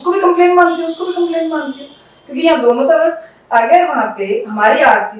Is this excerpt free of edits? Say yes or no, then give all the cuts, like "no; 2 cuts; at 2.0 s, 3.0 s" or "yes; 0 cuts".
yes; 0 cuts